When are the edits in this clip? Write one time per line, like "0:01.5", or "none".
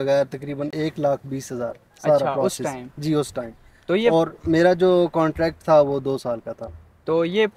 none